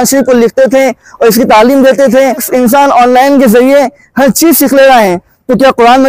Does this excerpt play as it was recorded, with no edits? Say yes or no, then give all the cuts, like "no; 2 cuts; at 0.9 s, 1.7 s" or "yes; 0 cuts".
no; 1 cut; at 2.5 s